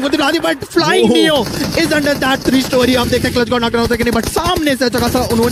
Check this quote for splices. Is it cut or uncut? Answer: uncut